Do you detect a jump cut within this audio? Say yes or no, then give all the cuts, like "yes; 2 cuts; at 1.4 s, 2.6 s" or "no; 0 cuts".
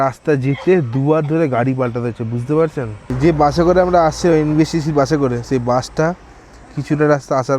yes; 1 cut; at 3.0 s